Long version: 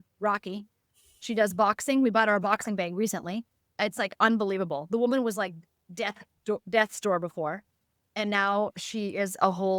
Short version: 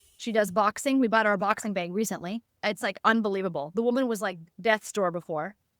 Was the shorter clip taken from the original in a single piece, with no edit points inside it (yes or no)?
no